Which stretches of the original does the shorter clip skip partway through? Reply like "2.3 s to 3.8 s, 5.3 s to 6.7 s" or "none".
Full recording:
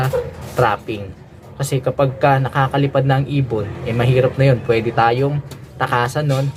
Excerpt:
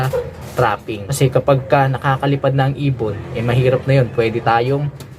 1.0 s to 1.5 s

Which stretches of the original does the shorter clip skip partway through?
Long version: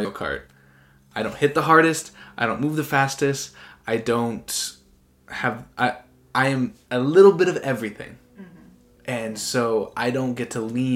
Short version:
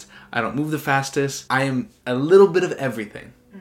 3.4 s to 6.2 s

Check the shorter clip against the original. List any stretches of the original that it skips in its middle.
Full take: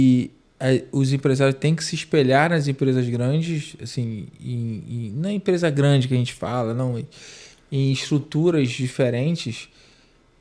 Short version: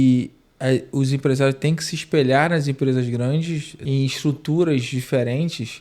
3.7 s to 7.6 s

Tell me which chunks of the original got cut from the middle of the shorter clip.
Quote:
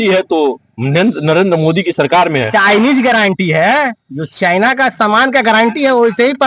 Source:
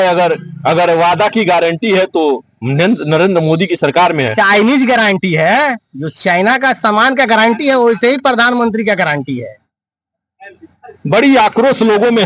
none

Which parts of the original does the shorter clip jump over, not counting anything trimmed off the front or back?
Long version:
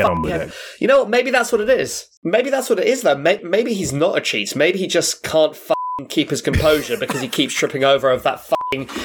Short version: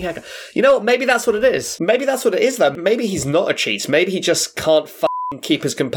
1.9 s to 2.1 s, 3.2 s to 3.4 s

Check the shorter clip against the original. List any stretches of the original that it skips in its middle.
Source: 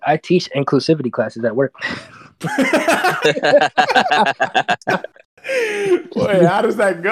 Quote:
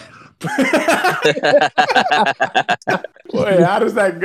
5.3 s to 6.1 s

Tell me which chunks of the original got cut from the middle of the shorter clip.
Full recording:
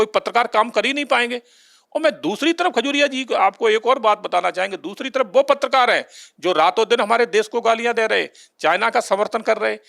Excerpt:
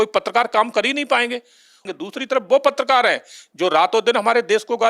1.9 s to 4.7 s

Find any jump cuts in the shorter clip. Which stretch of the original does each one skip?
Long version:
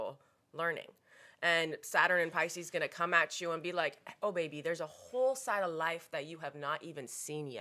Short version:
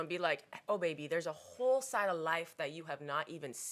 none

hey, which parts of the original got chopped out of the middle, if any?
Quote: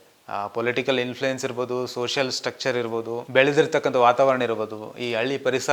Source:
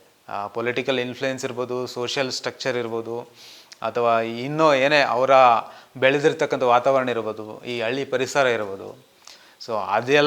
3.2 s to 5.8 s

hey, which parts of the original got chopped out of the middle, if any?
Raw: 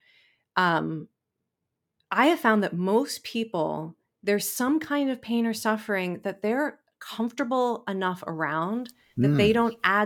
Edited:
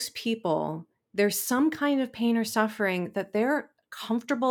none

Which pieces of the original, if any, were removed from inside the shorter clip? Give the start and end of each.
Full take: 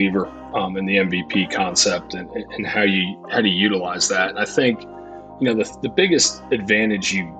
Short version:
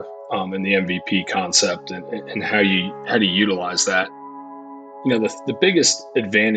4.6 s to 4.7 s

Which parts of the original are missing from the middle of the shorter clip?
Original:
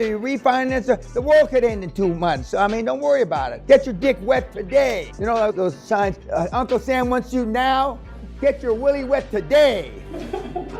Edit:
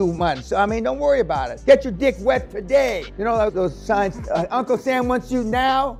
none

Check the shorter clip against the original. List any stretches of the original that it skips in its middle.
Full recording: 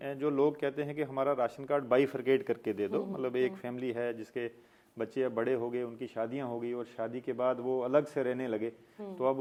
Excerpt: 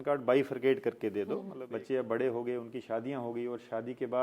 3.2 s to 4.8 s

